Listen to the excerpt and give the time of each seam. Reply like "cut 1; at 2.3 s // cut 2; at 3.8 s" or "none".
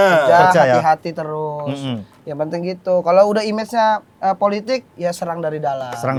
none